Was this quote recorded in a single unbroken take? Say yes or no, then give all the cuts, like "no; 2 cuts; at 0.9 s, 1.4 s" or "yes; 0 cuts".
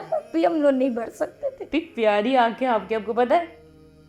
no; 1 cut; at 1.6 s